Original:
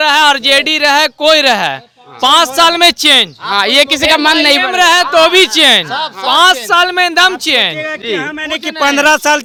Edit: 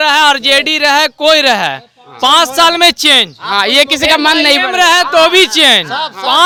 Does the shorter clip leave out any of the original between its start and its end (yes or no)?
no